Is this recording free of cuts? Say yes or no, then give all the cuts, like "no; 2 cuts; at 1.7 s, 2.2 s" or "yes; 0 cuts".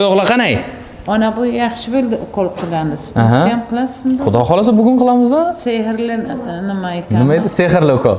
yes; 0 cuts